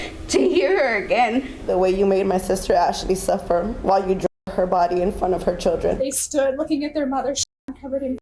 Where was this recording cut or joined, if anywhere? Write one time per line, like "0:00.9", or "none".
0:01.6
0:06.0